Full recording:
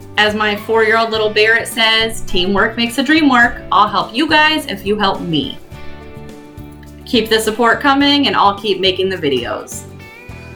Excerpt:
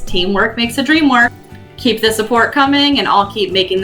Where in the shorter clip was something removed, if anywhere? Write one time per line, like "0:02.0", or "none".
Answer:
0:01.4